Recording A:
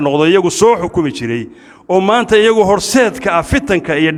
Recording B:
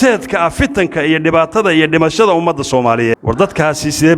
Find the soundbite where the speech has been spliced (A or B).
B